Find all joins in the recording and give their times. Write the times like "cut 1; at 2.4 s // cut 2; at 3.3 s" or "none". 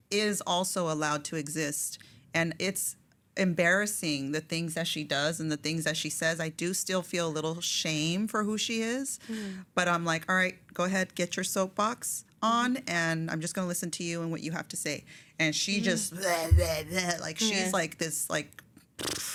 none

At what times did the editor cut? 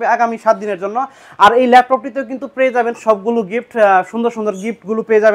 none

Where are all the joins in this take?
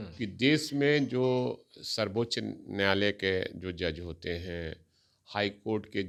none

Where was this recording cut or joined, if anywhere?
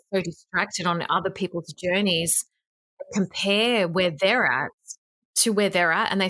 none

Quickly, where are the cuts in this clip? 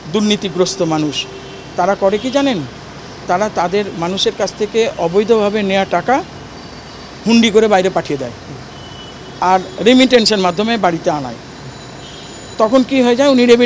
none

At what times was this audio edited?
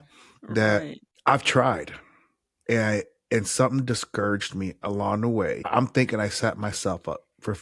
cut 1; at 1.0 s // cut 2; at 5.7 s

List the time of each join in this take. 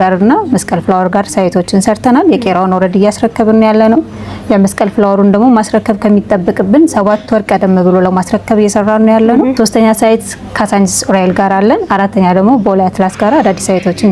cut 1; at 9.5 s

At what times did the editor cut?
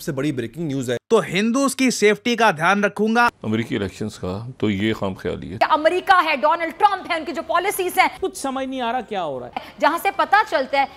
cut 1; at 1.0 s // cut 2; at 3.3 s // cut 3; at 5.5 s // cut 4; at 8.2 s

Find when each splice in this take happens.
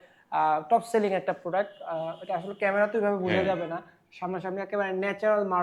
none

